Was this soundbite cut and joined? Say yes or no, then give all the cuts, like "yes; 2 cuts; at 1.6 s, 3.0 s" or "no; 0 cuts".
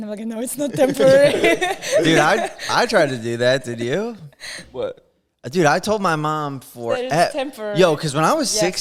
no; 0 cuts